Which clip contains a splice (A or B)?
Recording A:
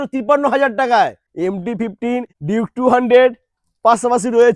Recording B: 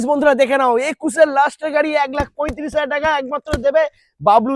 A